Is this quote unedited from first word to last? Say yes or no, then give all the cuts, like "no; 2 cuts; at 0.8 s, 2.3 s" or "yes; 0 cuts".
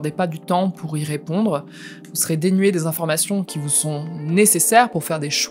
yes; 0 cuts